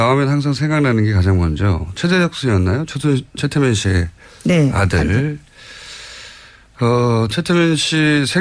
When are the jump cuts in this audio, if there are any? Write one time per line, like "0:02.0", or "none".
0:02.8